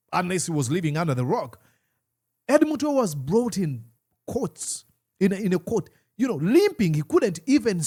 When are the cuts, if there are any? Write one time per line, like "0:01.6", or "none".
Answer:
none